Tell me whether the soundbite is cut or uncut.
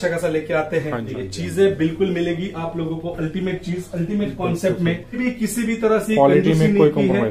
cut